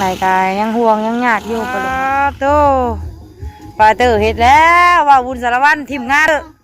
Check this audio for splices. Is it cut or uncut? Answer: cut